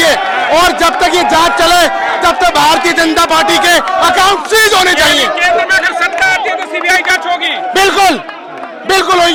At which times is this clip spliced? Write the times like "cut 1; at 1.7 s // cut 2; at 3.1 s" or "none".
none